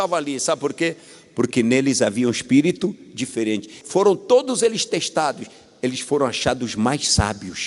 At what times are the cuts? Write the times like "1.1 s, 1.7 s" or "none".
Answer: 3.8 s